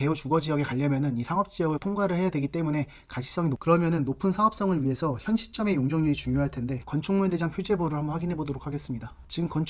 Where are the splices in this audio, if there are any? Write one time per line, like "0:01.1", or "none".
0:03.6
0:06.8